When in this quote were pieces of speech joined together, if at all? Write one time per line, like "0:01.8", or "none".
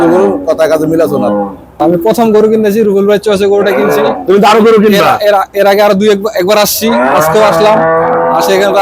0:01.8